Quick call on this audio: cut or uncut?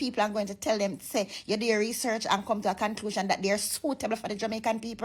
uncut